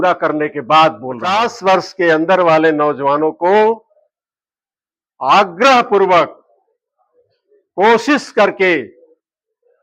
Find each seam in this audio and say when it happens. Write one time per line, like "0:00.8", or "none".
0:01.5